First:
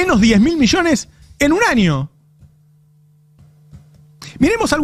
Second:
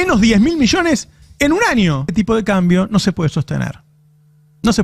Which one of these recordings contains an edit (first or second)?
second